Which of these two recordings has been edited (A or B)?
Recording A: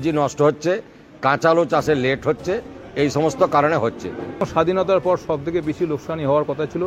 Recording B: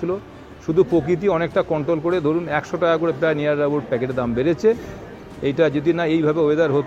A